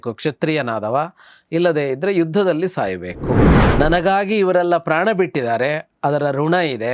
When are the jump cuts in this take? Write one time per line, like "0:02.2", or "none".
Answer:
0:03.5